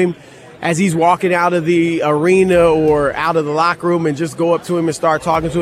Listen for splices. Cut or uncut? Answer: uncut